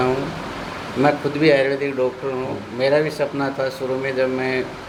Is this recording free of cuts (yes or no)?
yes